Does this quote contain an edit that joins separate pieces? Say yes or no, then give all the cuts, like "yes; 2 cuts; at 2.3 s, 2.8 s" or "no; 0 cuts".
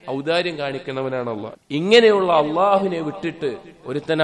yes; 1 cut; at 1.5 s